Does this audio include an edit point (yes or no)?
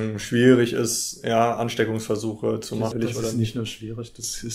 yes